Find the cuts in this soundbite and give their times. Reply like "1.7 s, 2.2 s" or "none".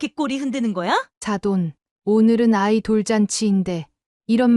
1.1 s